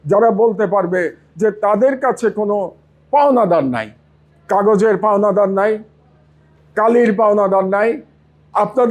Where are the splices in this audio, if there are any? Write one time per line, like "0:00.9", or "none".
none